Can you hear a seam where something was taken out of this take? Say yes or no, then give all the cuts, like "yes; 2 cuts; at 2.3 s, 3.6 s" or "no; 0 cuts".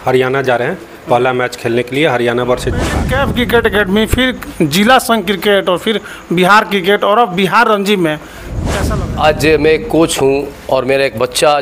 yes; 2 cuts; at 3.0 s, 8.7 s